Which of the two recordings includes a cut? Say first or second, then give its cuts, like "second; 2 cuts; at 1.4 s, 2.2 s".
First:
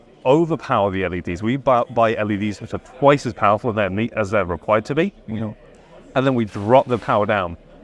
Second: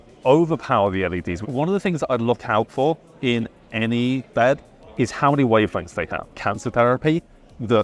second; 3 cuts; at 1.4 s, 4.3 s, 6.4 s